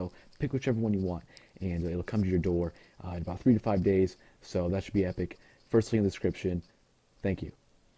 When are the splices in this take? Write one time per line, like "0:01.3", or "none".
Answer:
0:02.1